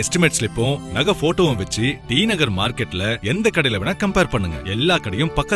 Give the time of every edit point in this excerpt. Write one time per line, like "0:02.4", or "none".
none